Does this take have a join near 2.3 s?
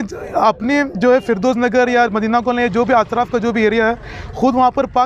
no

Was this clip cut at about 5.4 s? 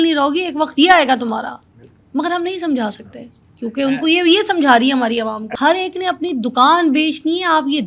yes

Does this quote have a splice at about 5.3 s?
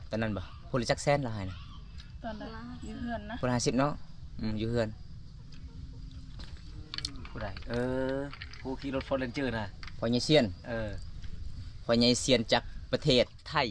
no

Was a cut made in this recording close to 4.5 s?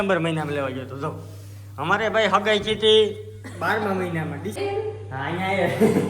yes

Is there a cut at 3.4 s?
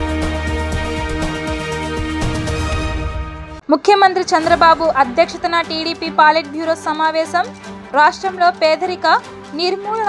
yes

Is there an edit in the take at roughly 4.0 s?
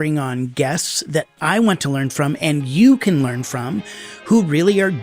no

